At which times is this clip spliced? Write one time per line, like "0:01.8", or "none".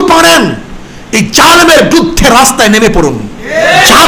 none